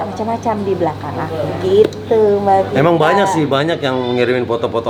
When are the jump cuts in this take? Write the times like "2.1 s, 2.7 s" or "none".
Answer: none